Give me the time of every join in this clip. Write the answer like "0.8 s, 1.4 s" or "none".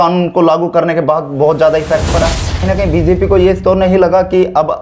2.6 s